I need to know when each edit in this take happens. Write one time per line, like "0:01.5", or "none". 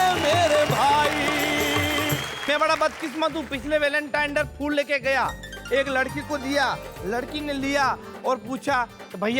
0:02.3